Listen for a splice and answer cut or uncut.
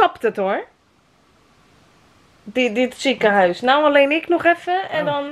uncut